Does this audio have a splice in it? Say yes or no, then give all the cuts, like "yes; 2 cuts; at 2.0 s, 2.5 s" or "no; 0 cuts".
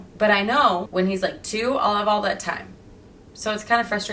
no; 0 cuts